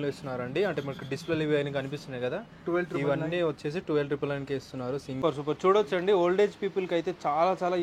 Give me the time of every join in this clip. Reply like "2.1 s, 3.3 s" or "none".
5.2 s